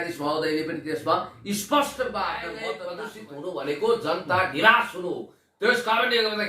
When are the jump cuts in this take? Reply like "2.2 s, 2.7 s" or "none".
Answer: 2.9 s